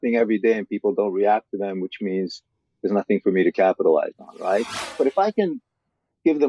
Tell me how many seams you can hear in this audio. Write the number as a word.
one